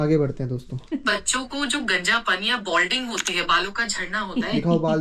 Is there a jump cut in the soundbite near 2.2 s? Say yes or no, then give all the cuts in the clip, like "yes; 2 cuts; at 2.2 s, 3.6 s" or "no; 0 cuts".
no; 0 cuts